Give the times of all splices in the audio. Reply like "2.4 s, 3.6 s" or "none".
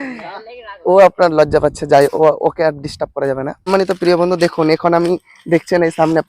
3.7 s